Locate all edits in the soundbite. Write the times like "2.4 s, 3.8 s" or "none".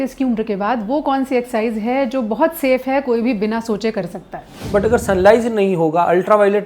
4.5 s